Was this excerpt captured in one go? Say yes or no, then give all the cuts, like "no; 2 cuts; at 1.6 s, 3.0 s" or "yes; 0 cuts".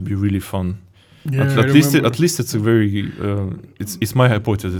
yes; 0 cuts